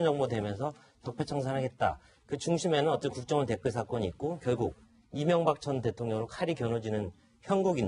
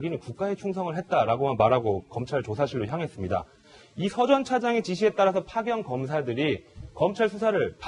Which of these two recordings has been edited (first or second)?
first